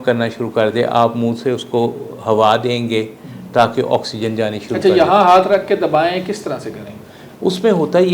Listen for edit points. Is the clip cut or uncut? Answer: uncut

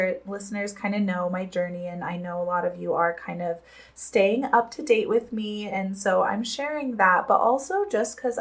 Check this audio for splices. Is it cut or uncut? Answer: uncut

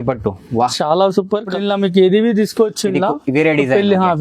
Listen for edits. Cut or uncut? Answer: cut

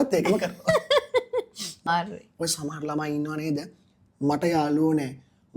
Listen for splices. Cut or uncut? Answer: cut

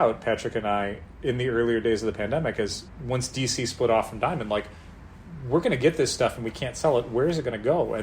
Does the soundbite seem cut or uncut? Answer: cut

